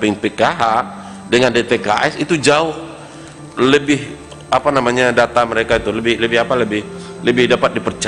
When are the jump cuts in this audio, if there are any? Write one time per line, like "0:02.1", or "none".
none